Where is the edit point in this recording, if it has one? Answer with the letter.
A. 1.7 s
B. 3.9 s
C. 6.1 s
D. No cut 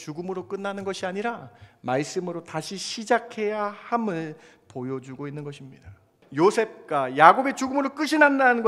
C